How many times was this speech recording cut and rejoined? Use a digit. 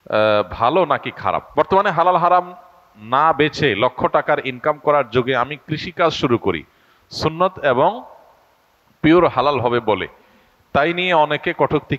1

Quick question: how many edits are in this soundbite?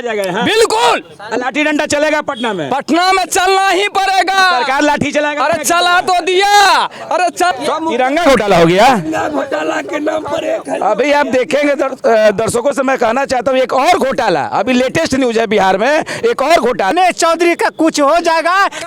2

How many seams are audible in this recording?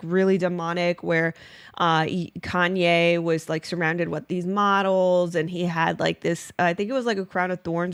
0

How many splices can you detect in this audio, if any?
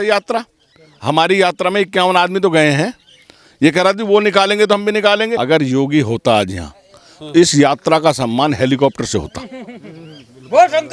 1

